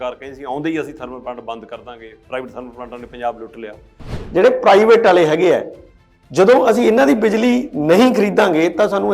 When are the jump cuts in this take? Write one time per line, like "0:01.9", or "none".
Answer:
0:04.2

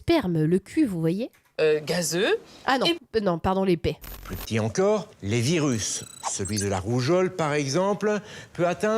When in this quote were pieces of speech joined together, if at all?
0:04.1

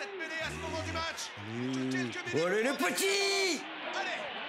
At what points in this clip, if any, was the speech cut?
none

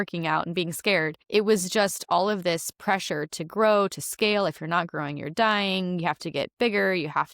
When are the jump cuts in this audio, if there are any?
0:01.2

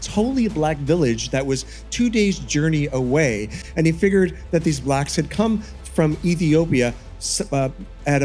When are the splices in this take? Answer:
none

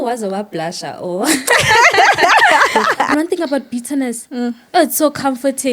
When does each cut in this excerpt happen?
0:03.1

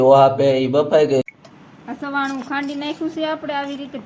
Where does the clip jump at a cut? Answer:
0:01.3

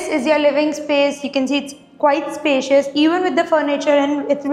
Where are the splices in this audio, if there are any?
none

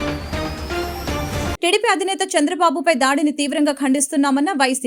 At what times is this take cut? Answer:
0:01.6

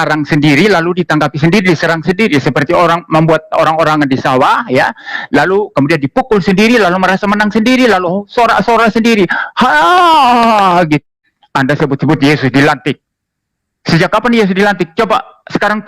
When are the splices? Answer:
0:11.0

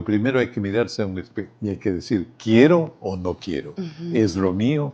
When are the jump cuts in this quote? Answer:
0:01.4
0:02.3

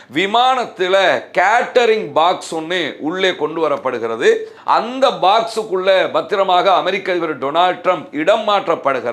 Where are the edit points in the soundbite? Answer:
0:04.5

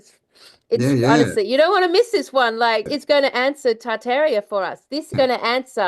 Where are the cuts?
0:02.9
0:05.1

